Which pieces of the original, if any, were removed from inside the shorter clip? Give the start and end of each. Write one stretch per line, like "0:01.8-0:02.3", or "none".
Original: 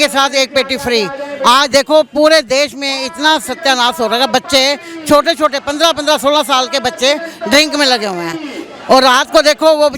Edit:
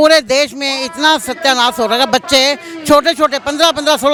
none